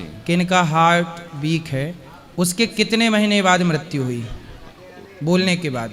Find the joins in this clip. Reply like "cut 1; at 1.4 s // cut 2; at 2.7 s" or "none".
none